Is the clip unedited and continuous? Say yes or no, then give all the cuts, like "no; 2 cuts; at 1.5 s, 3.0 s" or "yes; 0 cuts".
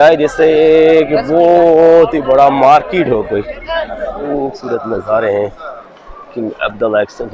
no; 1 cut; at 4.2 s